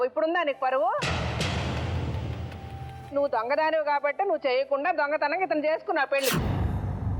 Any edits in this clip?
yes; 3 cuts; at 1.1 s, 3.1 s, 6.3 s

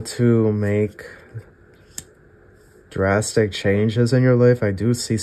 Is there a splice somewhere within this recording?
no; 0 cuts

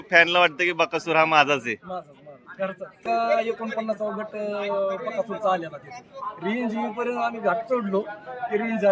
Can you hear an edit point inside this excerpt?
yes; 1 cut; at 3.0 s

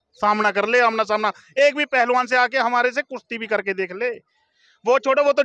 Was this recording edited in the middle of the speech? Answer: no; 0 cuts

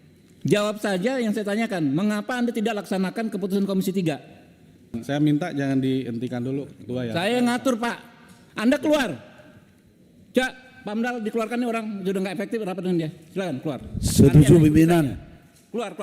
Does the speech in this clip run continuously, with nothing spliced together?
no; 1 cut; at 5.0 s

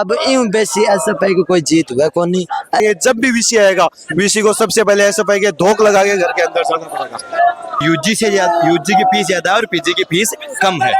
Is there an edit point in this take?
yes; 2 cuts; at 2.8 s, 7.8 s

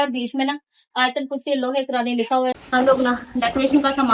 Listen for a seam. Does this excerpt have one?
yes; 1 cut; at 2.6 s

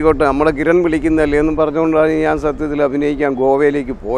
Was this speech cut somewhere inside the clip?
no; 0 cuts

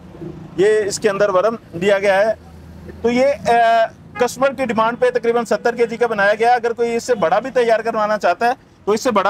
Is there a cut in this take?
no; 0 cuts

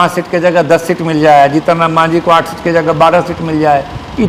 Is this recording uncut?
yes; 0 cuts

